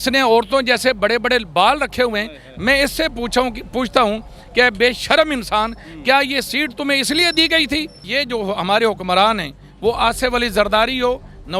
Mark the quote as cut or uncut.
cut